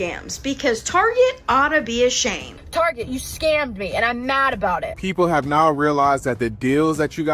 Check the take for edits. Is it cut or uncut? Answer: cut